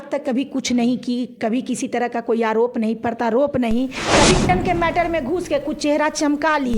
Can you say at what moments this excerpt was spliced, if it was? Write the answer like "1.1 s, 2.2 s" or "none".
4.5 s

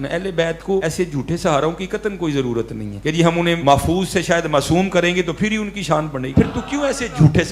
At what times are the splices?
0.8 s, 3.3 s, 6.2 s

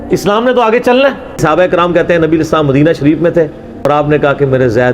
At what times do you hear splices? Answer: 1.4 s, 3.7 s

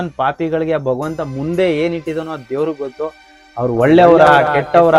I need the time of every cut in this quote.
none

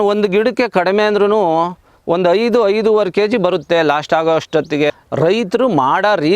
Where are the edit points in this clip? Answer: 4.9 s

